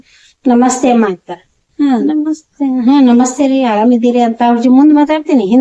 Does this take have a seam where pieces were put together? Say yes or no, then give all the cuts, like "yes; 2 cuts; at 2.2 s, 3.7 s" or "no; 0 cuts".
no; 0 cuts